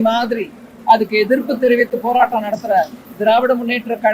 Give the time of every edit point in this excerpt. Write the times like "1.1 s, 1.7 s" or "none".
3.0 s